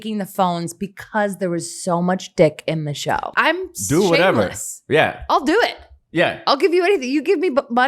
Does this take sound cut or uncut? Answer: cut